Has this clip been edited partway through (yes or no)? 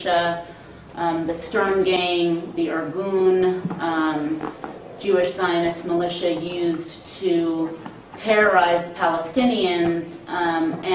no